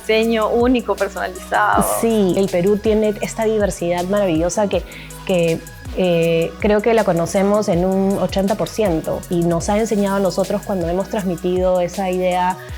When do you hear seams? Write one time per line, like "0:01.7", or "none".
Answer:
0:02.4
0:09.3